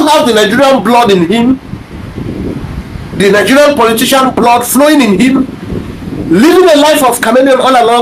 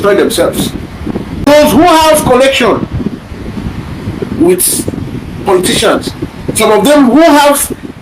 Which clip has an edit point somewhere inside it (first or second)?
second